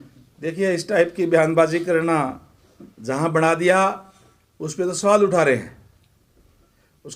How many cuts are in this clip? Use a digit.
0